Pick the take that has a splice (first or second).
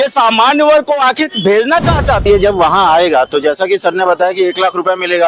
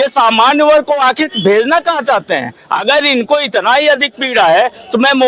first